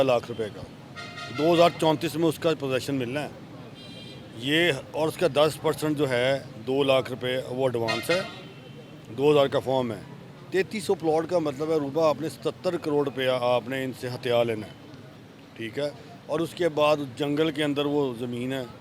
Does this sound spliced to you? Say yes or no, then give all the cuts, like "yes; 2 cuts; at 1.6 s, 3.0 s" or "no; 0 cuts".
no; 0 cuts